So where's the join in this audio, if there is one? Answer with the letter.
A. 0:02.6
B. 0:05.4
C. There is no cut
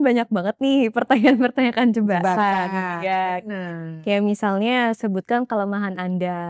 C